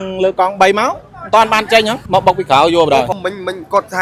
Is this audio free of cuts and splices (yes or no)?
no